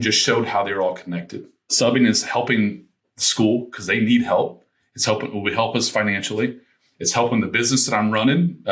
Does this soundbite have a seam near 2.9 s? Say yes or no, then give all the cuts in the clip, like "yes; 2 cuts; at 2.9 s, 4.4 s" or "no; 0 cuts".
no; 1 cut; at 1.7 s